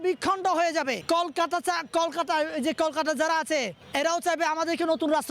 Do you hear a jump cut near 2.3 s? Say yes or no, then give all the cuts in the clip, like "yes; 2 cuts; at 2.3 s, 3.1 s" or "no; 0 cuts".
no; 2 cuts; at 1.0 s, 3.8 s